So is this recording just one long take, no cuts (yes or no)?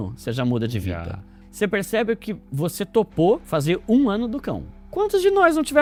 yes